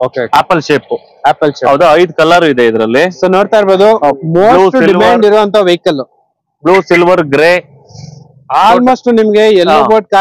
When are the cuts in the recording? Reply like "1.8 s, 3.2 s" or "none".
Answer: none